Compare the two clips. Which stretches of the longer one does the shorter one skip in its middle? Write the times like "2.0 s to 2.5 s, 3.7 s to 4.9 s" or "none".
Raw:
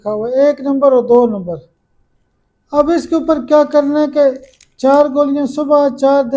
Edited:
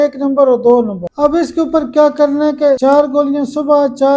1.5 s to 2.6 s, 4.3 s to 4.8 s